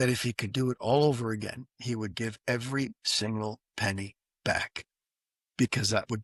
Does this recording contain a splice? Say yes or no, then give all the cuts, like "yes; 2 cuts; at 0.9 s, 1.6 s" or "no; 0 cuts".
no; 0 cuts